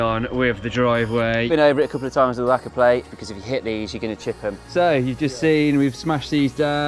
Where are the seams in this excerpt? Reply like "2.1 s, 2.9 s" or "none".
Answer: 1.5 s, 3.1 s, 4.7 s